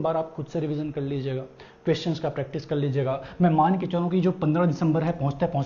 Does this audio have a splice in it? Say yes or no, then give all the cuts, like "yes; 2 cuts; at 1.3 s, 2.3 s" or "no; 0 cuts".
no; 0 cuts